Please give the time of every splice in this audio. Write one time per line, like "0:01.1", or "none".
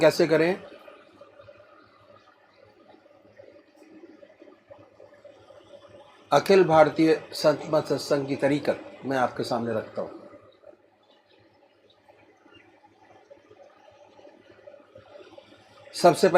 0:06.9